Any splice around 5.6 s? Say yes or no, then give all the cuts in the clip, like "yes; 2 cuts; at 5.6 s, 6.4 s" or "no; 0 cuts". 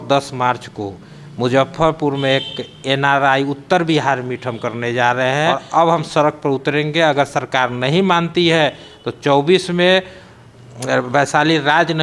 yes; 1 cut; at 5.6 s